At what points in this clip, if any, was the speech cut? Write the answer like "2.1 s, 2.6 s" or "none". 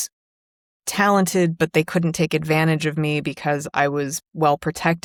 none